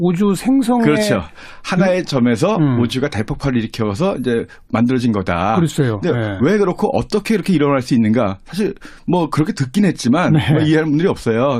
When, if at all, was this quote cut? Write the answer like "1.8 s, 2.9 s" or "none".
none